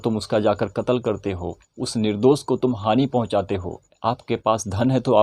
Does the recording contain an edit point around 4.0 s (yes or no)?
yes